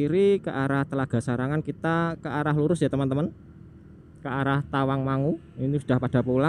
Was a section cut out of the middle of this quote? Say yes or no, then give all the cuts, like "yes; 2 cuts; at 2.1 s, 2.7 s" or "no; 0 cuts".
no; 0 cuts